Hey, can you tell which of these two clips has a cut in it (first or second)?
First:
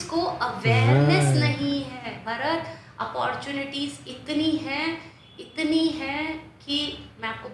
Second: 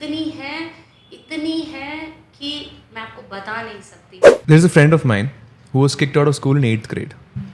second